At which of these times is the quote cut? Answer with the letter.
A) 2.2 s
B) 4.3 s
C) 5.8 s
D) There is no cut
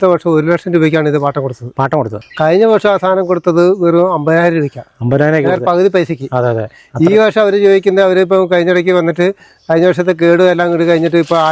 A